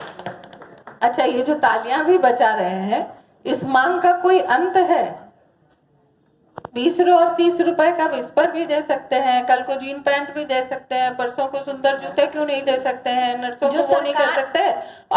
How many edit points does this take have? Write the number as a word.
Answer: zero